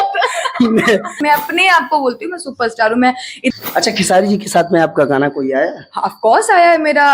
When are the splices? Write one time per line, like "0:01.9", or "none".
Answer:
0:01.2
0:03.5